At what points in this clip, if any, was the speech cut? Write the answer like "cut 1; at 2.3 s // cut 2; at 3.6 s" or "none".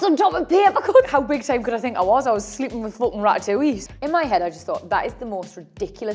cut 1; at 1.1 s // cut 2; at 3.8 s